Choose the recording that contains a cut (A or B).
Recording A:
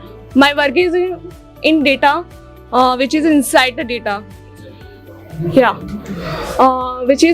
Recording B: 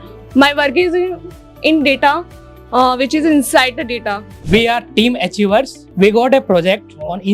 B